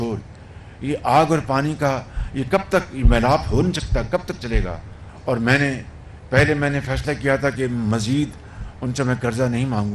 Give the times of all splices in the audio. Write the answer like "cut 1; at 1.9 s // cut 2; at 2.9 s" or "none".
cut 1; at 4.8 s